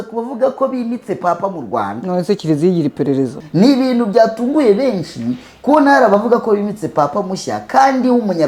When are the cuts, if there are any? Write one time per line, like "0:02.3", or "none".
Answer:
0:03.4